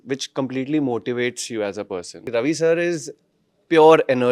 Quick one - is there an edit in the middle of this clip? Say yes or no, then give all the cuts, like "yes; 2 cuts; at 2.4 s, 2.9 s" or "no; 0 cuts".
yes; 1 cut; at 2.2 s